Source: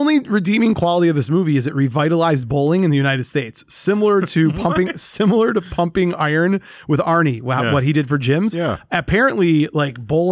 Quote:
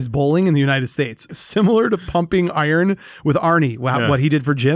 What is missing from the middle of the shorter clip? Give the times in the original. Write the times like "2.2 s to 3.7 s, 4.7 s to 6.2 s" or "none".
3.7 s to 5.0 s